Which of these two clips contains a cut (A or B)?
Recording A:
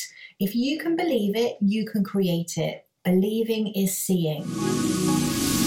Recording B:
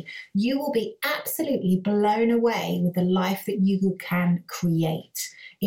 A